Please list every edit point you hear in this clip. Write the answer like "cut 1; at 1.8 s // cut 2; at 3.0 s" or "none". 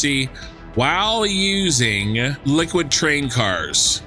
cut 1; at 2.4 s